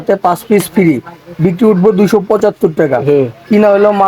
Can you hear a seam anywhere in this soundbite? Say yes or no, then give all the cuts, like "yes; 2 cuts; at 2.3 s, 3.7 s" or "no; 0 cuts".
no; 0 cuts